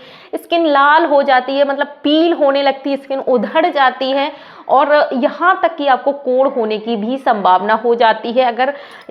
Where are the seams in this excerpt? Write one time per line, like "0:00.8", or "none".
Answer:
none